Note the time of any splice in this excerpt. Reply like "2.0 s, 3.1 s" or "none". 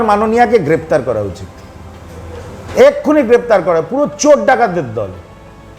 none